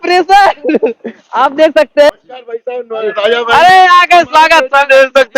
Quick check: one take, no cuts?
no; 1 cut; at 2.1 s

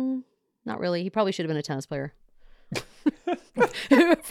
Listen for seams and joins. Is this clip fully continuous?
yes; 0 cuts

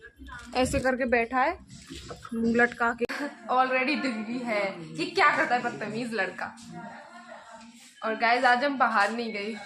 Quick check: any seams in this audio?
yes; 1 cut; at 3.0 s

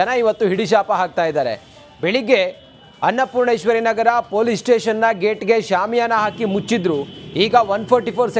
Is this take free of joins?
yes; 0 cuts

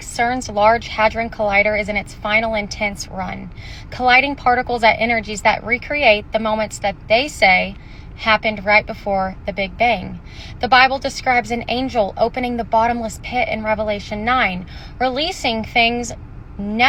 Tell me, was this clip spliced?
no; 0 cuts

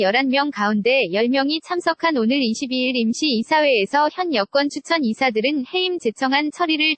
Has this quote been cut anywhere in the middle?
no; 0 cuts

